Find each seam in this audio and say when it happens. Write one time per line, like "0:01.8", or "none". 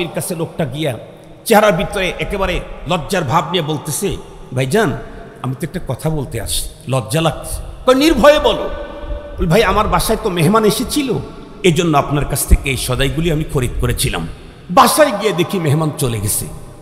none